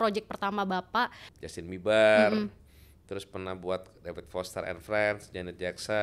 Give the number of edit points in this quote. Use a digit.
1